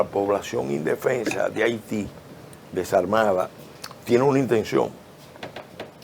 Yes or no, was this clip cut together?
no